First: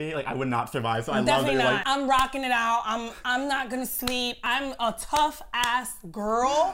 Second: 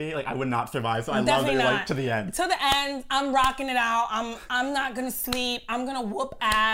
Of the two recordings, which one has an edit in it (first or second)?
first